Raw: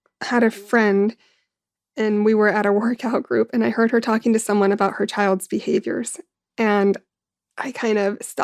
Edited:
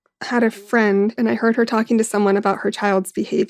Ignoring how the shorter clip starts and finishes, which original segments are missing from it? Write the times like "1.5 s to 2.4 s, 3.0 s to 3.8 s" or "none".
1.1 s to 3.5 s